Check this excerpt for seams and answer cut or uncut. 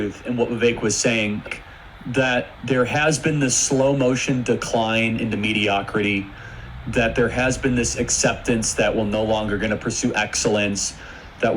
cut